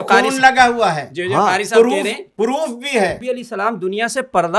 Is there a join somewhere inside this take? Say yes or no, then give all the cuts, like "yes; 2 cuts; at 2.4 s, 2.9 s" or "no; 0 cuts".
yes; 1 cut; at 3.2 s